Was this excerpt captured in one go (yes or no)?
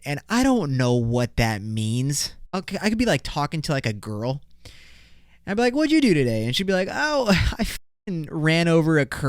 no